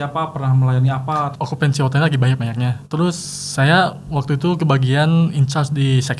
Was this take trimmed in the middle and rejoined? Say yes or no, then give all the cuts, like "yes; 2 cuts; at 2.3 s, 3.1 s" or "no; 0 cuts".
yes; 2 cuts; at 1.3 s, 2.8 s